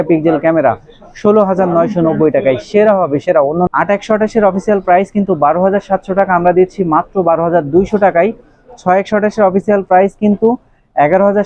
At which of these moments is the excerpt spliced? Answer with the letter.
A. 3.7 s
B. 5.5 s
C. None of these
A